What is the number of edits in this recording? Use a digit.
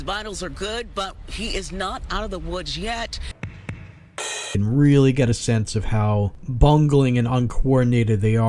3